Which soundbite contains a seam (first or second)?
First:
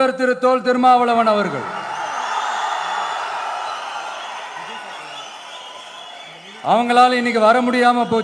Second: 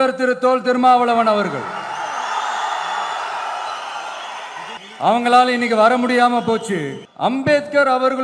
second